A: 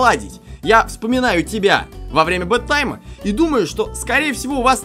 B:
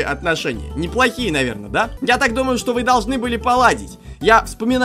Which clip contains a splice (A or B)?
B